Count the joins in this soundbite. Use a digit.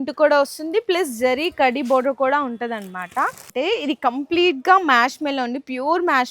1